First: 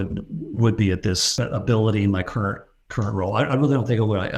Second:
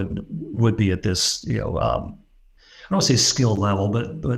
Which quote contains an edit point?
first; 1 cut; at 1.3 s

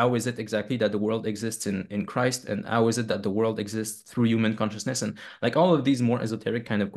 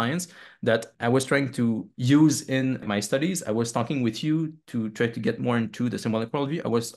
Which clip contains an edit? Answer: second; 3 cuts; at 0.9 s, 1.9 s, 2.8 s

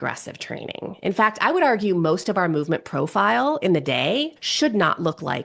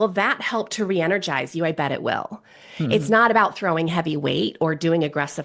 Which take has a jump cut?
first; 1 cut; at 4.4 s

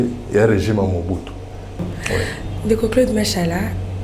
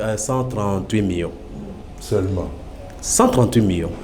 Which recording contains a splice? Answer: first; 1 cut; at 1.8 s

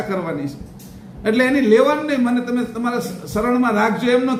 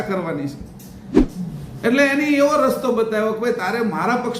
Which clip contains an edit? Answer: second; 1 cut; at 1.0 s

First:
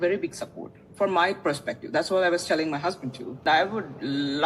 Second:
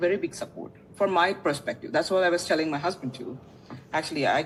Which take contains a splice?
first; 1 cut; at 3.4 s

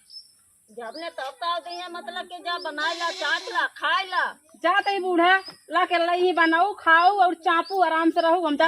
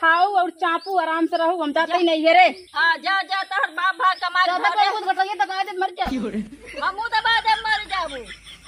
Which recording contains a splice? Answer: first; 1 cut; at 4.4 s

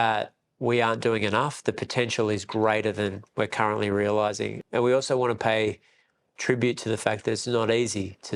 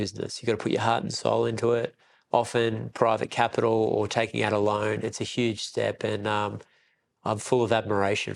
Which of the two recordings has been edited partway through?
first; 1 cut; at 4.6 s

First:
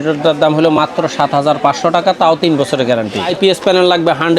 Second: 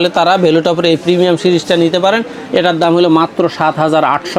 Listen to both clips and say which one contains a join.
first; 1 cut; at 3.3 s

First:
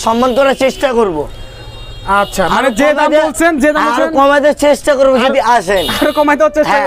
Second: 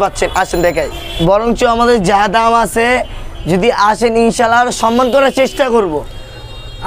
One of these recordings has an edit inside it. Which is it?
second; 1 cut; at 1.0 s

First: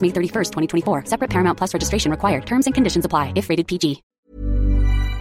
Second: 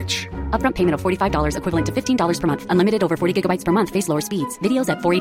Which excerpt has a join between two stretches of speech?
first; 1 cut; at 4.1 s

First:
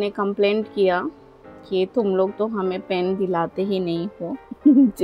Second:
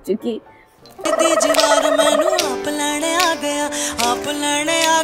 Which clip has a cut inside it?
second; 1 cut; at 1.1 s

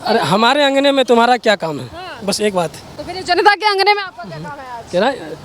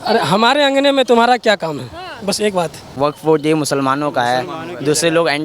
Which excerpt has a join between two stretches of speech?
second; 1 cut; at 2.9 s

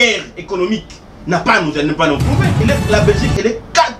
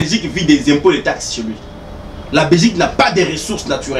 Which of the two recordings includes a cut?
first; 1 cut; at 2.6 s

